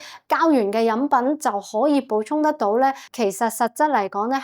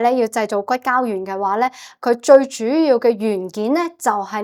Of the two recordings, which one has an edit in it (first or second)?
first